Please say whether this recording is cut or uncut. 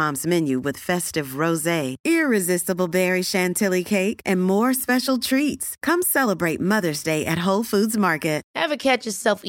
cut